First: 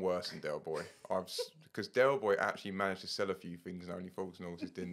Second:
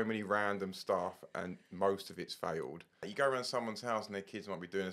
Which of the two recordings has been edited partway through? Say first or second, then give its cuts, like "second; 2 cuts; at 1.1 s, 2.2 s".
second; 1 cut; at 3.0 s